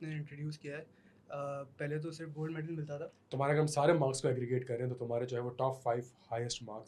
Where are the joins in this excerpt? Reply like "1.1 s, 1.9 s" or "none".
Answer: 3.3 s